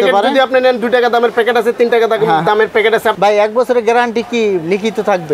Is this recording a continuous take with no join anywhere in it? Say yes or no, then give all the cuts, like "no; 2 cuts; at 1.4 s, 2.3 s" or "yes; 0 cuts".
no; 1 cut; at 3.1 s